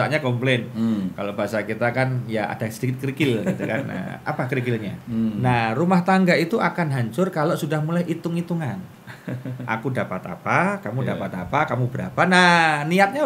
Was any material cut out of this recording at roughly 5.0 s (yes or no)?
yes